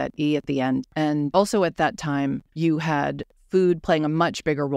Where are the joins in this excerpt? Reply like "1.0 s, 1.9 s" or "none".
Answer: 1.1 s, 2.5 s, 3.3 s

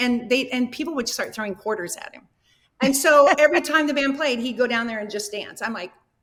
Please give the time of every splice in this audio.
none

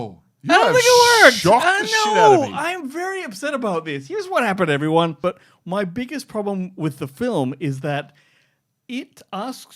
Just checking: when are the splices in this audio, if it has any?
5.2 s

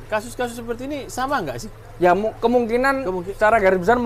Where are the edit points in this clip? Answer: none

